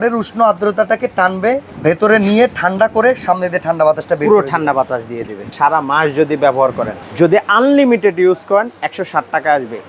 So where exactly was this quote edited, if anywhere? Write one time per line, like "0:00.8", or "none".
0:01.7
0:05.4
0:07.0